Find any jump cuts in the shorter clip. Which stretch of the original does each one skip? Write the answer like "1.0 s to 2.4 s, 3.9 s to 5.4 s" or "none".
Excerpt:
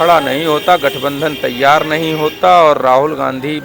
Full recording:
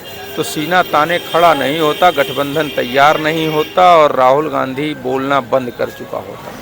none